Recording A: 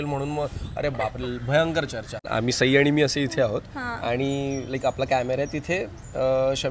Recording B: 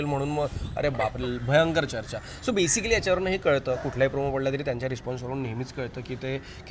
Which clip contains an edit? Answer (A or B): A